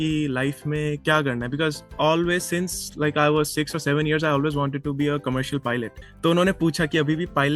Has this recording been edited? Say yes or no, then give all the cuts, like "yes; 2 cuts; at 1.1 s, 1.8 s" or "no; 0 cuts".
yes; 1 cut; at 6.0 s